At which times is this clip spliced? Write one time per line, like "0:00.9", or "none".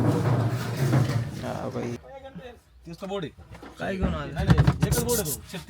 0:02.0